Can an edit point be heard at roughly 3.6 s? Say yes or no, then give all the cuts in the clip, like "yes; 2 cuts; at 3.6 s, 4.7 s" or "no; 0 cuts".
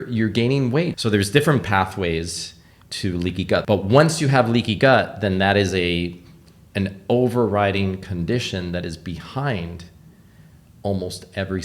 yes; 2 cuts; at 1.0 s, 3.6 s